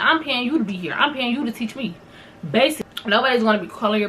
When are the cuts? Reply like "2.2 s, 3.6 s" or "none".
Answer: 2.9 s